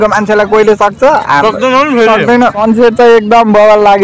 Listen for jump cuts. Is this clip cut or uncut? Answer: cut